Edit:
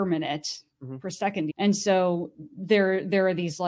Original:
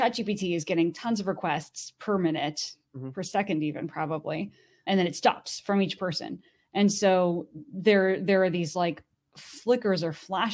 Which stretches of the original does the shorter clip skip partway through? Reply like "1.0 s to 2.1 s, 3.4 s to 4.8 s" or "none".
3.6 s to 6.7 s